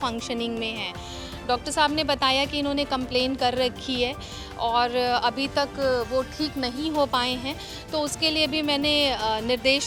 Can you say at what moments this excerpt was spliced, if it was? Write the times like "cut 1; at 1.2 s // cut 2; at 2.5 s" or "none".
none